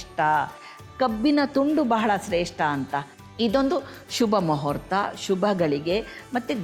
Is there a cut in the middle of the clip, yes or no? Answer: yes